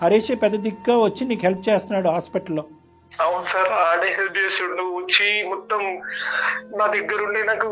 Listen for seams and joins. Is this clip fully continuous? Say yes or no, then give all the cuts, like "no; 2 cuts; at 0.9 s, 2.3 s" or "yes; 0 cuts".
yes; 0 cuts